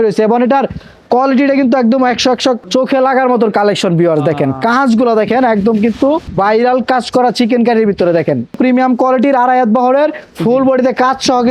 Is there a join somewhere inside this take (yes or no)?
yes